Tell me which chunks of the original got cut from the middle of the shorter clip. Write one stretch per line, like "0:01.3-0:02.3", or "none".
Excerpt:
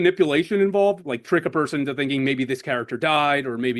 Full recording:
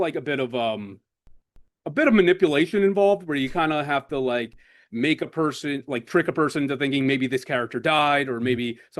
0:03.2-0:05.8